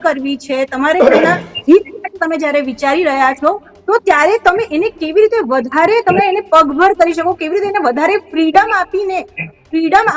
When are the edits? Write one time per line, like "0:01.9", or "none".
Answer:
none